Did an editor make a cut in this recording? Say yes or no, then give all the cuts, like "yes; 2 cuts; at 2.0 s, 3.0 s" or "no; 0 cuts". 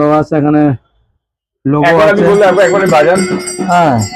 no; 0 cuts